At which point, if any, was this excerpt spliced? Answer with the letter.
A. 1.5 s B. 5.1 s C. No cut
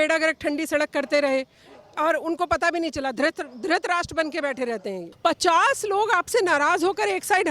B